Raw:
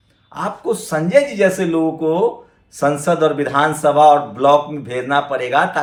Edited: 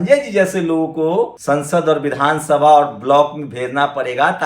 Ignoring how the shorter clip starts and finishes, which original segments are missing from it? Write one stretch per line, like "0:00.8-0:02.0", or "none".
0:02.4-0:02.7